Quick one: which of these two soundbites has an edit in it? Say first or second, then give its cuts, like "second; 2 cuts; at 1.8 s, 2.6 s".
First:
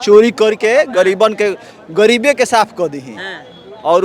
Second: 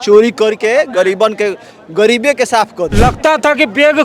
second; 1 cut; at 2.9 s